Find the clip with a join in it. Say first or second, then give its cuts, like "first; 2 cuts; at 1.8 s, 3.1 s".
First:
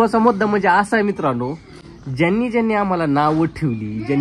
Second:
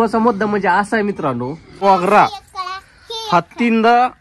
second; 1 cut; at 1.8 s